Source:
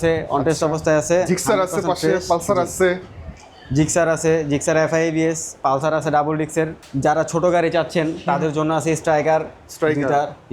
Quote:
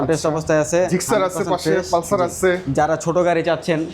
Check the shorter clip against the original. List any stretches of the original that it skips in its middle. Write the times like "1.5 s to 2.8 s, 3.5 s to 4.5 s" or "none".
3.0 s to 6.9 s